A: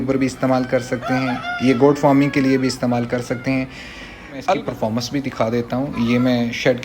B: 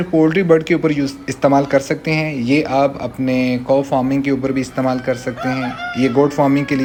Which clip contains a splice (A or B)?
A